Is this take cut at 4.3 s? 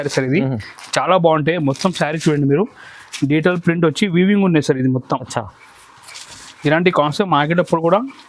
no; 0 cuts

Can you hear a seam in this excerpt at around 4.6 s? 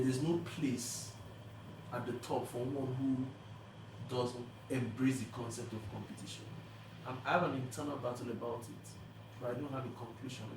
yes; 1 cut; at 4.6 s

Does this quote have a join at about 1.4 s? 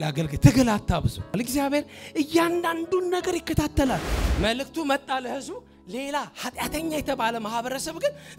yes; 2 cuts; at 1.4 s, 4.2 s

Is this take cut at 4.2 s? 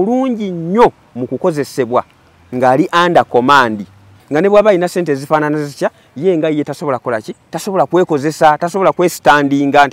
yes; 1 cut; at 4.2 s

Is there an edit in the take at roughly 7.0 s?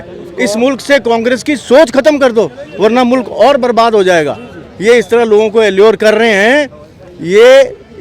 no; 0 cuts

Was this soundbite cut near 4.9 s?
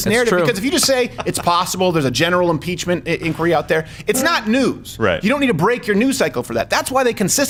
no; 0 cuts

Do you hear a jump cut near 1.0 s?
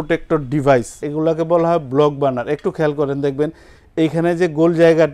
yes; 1 cut; at 1.0 s

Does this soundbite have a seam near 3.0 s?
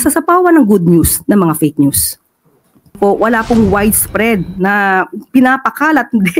yes; 1 cut; at 3.0 s

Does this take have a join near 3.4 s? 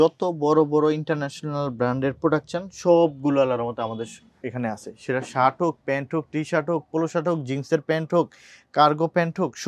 no; 0 cuts

